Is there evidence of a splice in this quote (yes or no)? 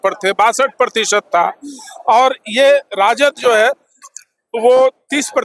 no